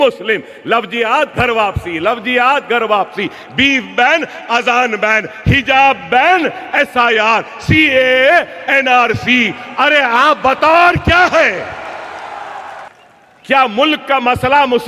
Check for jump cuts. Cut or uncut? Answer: cut